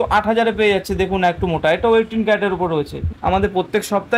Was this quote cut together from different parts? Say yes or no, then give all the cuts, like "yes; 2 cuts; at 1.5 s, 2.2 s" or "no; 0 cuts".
yes; 1 cut; at 3.0 s